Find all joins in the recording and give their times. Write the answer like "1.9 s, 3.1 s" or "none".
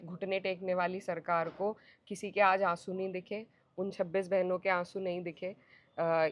none